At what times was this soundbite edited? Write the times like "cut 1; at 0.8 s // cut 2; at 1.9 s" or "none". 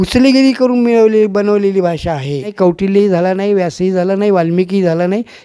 cut 1; at 2.5 s